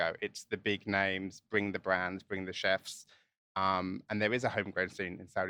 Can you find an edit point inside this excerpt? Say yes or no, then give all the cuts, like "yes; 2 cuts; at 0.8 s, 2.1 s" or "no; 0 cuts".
no; 0 cuts